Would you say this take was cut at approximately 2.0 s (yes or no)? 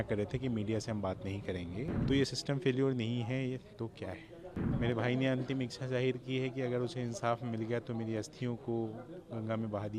yes